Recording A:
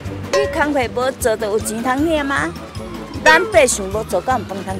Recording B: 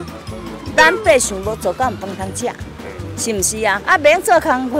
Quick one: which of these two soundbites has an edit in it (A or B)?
B